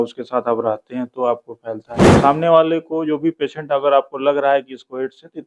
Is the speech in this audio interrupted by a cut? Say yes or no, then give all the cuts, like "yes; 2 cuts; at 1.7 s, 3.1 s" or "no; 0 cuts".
yes; 1 cut; at 2.0 s